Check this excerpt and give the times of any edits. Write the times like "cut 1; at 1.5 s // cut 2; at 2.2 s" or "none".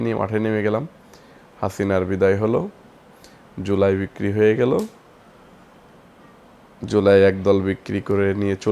none